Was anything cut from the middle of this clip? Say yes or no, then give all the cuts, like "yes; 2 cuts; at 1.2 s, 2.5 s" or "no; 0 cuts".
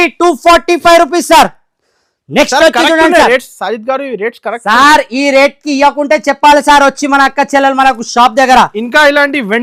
no; 0 cuts